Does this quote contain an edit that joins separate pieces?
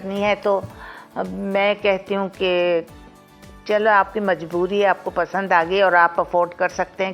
no; 0 cuts

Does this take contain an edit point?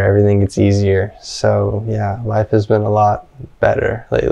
no; 0 cuts

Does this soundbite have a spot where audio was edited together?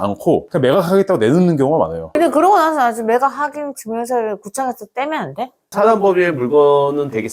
yes; 2 cuts; at 2.0 s, 5.6 s

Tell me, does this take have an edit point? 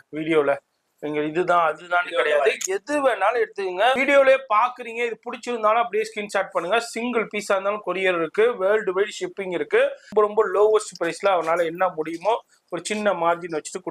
yes; 2 cuts; at 4.0 s, 10.1 s

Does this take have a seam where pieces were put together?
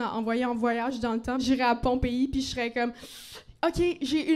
yes; 1 cut; at 1.4 s

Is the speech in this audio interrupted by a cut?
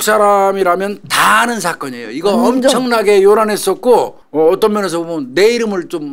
yes; 1 cut; at 4.2 s

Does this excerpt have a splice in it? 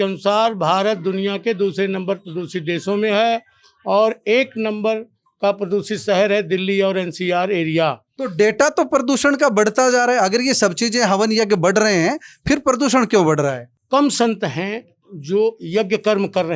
yes; 2 cuts; at 8.2 s, 13.7 s

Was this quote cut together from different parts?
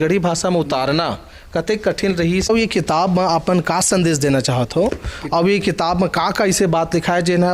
yes; 1 cut; at 2.5 s

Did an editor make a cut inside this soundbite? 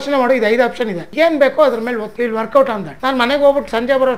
yes; 3 cuts; at 1.0 s, 2.1 s, 2.9 s

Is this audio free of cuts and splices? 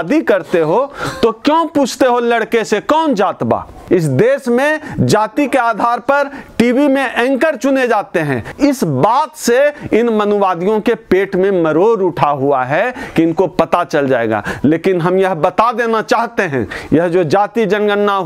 no; 2 cuts; at 3.8 s, 8.4 s

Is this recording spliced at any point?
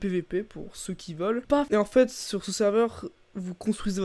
yes; 1 cut; at 1.5 s

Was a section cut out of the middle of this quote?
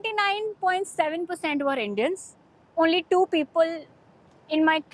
no; 0 cuts

